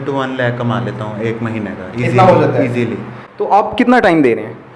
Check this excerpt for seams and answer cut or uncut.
uncut